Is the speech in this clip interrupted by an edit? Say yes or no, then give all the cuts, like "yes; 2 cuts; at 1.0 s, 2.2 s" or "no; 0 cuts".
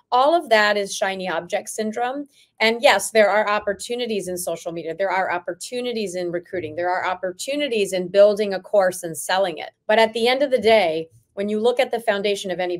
yes; 1 cut; at 9.7 s